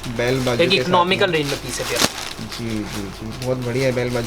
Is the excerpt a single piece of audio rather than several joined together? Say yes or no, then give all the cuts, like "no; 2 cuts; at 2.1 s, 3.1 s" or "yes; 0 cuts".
yes; 0 cuts